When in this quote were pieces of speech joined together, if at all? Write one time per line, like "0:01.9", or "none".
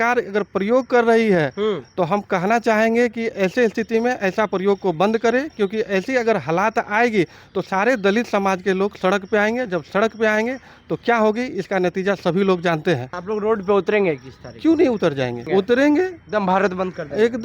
0:13.1
0:15.4